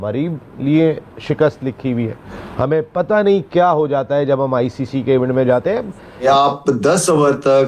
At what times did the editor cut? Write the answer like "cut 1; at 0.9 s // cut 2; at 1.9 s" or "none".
cut 1; at 2.2 s // cut 2; at 6.2 s